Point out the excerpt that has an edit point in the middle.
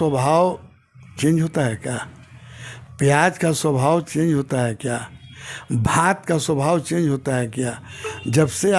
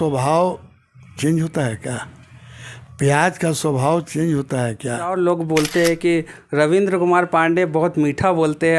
second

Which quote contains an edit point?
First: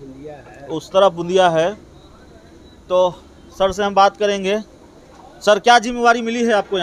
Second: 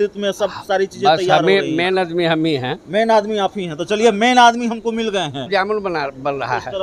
second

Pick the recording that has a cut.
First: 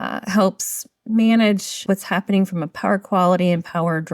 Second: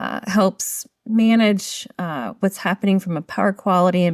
first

